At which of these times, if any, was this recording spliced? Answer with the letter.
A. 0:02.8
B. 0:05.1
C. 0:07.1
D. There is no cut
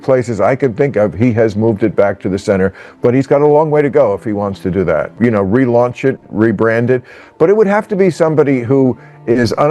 B